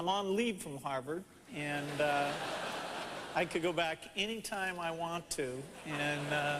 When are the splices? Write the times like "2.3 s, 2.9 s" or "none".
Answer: 2.7 s